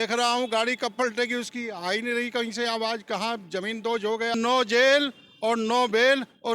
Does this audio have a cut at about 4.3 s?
yes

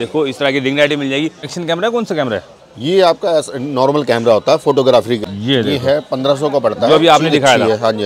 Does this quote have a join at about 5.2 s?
yes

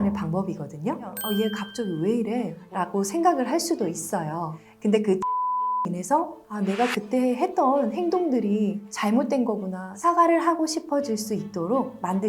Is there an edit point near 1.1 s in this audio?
yes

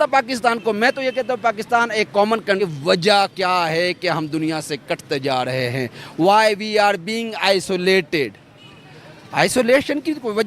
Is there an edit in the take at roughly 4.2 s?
no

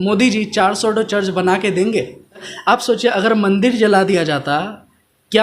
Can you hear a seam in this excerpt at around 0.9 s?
no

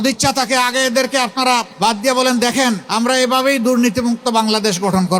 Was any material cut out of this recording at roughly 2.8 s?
yes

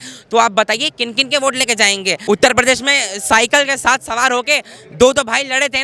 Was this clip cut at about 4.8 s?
no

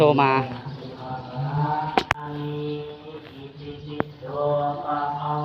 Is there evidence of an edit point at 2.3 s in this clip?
yes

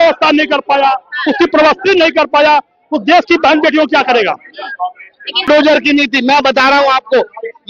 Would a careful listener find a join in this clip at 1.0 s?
no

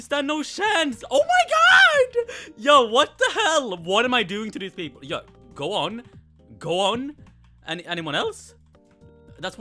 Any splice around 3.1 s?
no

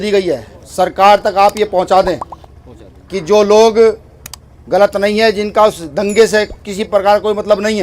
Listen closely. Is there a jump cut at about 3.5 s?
no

